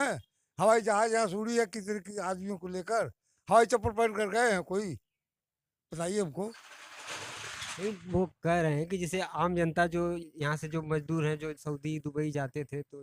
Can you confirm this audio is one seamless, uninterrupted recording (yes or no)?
yes